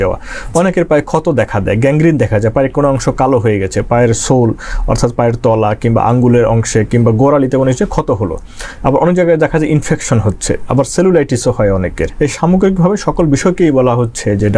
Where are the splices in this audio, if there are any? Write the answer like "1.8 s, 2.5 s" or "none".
12.0 s